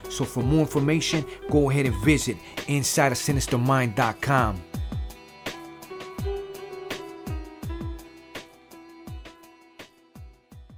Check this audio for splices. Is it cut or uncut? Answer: uncut